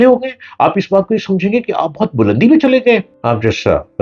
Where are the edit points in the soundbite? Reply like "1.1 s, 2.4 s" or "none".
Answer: 3.1 s